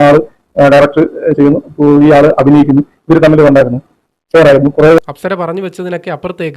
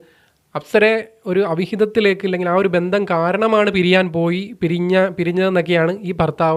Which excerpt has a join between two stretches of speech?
first; 1 cut; at 5.0 s

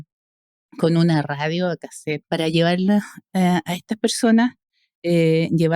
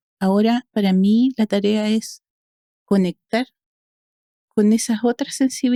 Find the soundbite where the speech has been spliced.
first; 1 cut; at 2.2 s

